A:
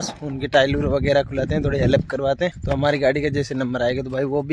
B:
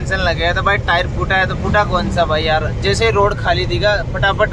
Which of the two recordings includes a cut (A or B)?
A